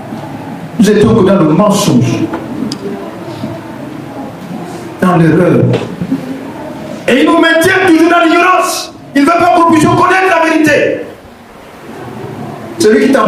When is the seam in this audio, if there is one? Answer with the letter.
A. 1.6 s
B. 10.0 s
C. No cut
C